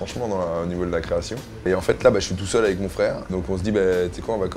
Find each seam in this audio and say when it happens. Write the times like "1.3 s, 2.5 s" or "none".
1.7 s, 3.4 s